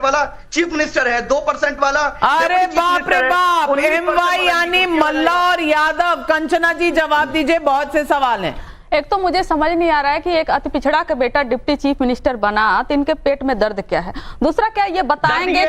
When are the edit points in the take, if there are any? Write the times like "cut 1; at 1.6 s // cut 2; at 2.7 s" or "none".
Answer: cut 1; at 12.2 s